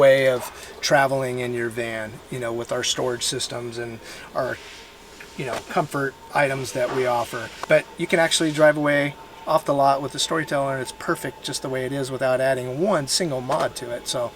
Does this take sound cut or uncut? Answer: cut